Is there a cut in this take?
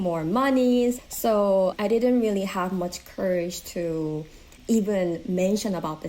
yes; 2 cuts; at 1.4 s, 4.5 s

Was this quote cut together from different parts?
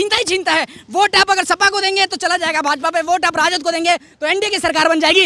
no; 0 cuts

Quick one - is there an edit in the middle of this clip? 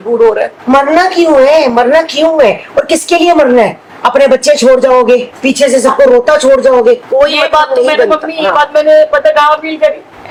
no; 0 cuts

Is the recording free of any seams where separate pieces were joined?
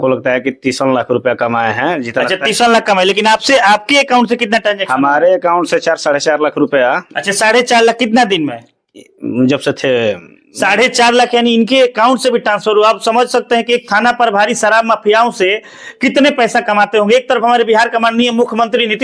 yes; 0 cuts

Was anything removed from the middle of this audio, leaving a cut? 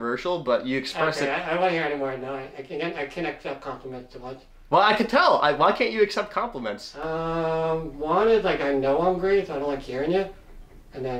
no; 0 cuts

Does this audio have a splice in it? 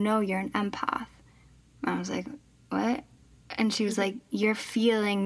no; 0 cuts

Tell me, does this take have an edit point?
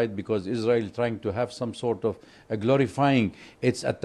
no; 0 cuts

